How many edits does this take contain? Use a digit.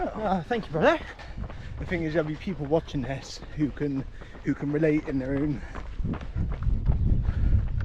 1